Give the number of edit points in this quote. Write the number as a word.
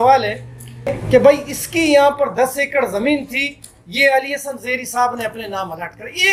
one